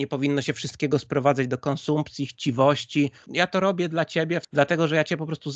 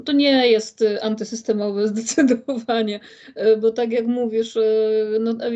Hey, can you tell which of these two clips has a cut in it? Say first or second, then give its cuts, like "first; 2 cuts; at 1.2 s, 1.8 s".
first; 2 cuts; at 3.2 s, 4.4 s